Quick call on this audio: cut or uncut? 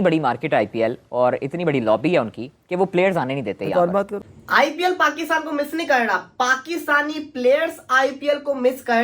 cut